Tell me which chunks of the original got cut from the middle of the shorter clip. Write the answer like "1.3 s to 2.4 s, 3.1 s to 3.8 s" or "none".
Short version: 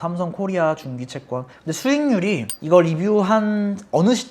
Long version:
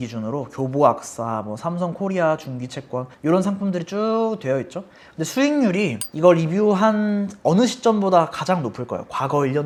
3.1 s to 5.0 s